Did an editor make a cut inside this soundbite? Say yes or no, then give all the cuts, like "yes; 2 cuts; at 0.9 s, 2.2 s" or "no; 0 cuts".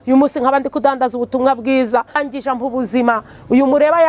yes; 1 cut; at 2.2 s